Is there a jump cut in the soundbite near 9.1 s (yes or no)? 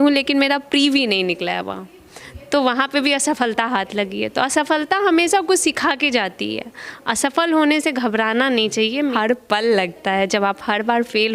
yes